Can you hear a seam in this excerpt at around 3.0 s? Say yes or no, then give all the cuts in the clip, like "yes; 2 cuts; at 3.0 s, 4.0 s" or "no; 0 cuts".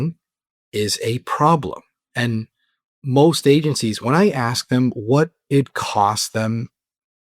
yes; 1 cut; at 3.0 s